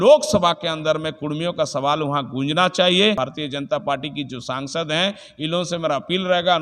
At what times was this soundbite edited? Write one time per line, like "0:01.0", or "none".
0:03.2